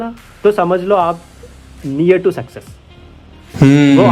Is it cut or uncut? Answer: uncut